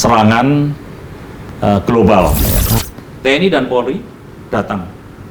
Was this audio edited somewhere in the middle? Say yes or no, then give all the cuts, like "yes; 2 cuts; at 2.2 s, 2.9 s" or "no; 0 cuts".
yes; 1 cut; at 2.8 s